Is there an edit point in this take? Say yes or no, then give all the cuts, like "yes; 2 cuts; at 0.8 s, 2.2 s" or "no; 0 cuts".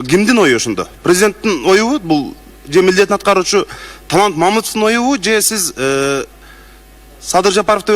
no; 0 cuts